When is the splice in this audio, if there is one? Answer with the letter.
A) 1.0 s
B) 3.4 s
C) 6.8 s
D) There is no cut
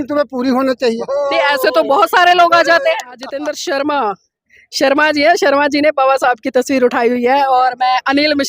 B